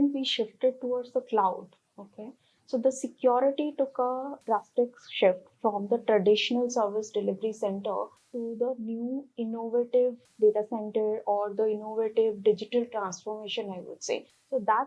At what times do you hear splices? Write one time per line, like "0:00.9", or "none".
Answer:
none